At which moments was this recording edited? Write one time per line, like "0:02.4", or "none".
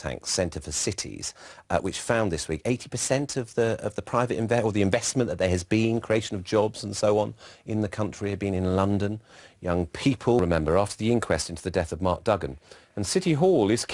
0:03.0